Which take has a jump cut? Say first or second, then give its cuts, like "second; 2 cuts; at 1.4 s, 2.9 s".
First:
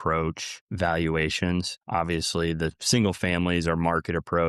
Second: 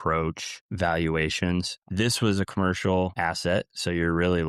second; 1 cut; at 1.8 s